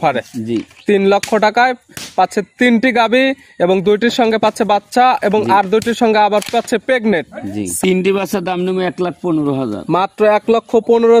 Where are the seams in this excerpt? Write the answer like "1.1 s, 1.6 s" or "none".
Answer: 7.8 s